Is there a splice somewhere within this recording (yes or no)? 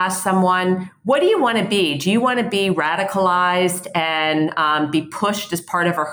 no